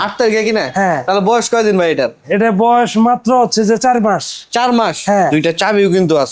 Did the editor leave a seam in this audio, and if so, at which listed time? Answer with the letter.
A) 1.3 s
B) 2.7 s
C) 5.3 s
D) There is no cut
C